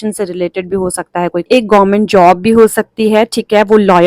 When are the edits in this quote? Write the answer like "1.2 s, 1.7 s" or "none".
1.5 s

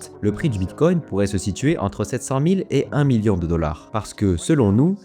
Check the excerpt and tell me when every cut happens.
3.8 s

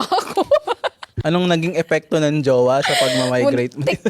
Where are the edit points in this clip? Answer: 1.1 s

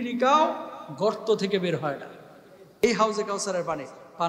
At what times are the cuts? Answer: 2.8 s

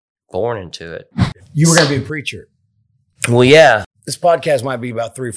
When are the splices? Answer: 1.4 s, 3.9 s

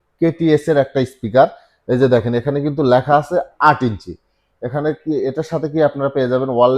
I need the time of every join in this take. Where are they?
none

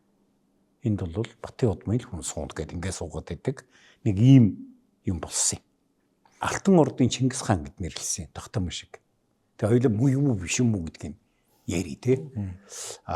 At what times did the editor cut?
6.5 s

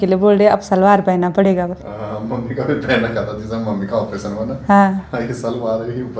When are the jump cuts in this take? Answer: none

